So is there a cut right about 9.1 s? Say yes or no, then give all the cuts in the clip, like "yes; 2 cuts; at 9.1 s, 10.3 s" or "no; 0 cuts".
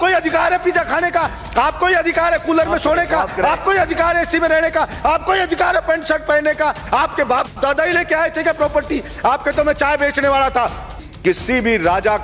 no; 1 cut; at 11.0 s